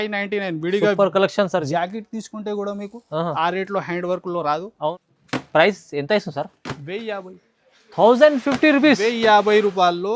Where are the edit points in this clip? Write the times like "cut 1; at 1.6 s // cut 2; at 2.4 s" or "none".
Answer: cut 1; at 4.9 s